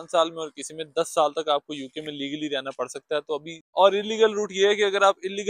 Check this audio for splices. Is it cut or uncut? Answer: cut